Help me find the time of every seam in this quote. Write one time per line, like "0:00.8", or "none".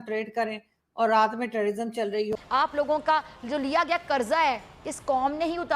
0:02.4